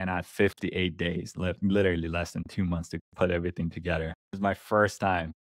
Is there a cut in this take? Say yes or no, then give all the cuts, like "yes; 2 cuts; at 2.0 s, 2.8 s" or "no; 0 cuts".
yes; 1 cut; at 4.2 s